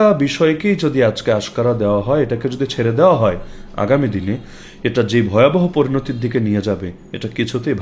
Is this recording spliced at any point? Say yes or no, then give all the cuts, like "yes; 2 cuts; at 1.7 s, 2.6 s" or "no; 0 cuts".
no; 0 cuts